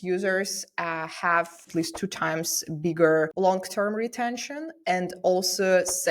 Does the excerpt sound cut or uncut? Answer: cut